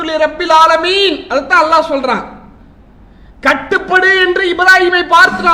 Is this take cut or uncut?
uncut